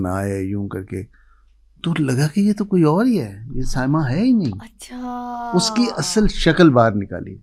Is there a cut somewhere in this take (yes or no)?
no